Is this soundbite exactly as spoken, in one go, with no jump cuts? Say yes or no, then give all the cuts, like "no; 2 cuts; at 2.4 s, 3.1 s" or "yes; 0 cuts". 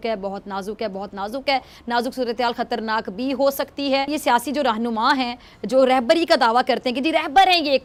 yes; 0 cuts